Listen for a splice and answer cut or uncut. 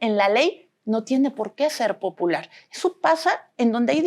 cut